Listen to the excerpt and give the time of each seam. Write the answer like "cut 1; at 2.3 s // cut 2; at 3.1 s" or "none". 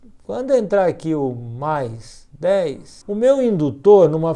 cut 1; at 2.9 s